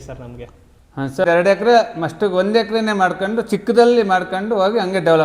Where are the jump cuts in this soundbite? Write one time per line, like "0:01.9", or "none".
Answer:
0:01.2